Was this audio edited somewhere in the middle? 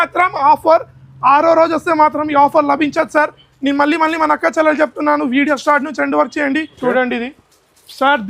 yes; 1 cut; at 6.7 s

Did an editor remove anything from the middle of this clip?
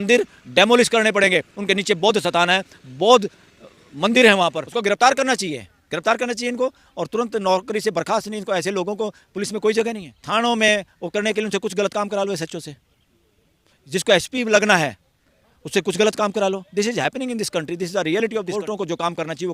yes; 3 cuts; at 4.6 s, 10.1 s, 18.5 s

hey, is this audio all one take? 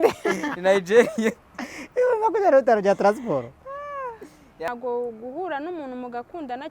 no; 1 cut; at 4.7 s

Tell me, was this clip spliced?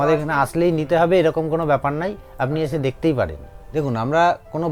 yes; 1 cut; at 3.6 s

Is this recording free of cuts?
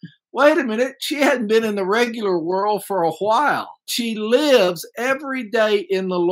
no; 1 cut; at 3.9 s

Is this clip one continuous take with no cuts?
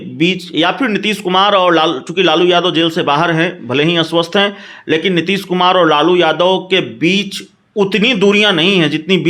yes; 0 cuts

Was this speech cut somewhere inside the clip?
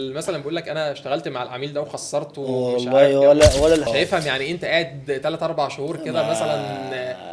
yes; 1 cut; at 3.9 s

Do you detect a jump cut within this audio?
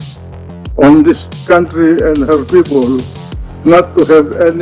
no; 0 cuts

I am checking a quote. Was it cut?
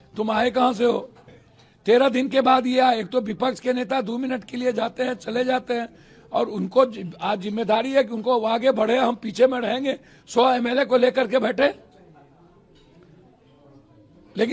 no; 0 cuts

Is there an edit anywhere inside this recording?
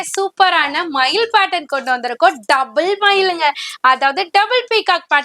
no; 0 cuts

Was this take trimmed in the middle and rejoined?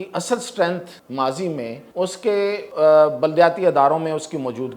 yes; 3 cuts; at 1.0 s, 1.8 s, 2.7 s

